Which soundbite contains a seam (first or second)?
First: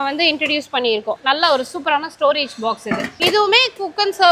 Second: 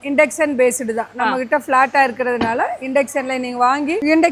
first